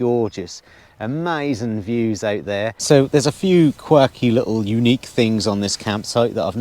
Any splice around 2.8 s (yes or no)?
yes